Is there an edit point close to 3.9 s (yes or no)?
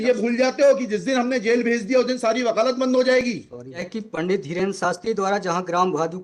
yes